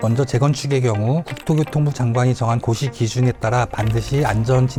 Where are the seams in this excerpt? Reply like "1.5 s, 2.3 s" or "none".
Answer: none